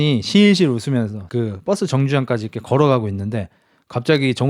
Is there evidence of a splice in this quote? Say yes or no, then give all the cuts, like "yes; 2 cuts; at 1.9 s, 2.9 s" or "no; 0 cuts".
yes; 1 cut; at 1.2 s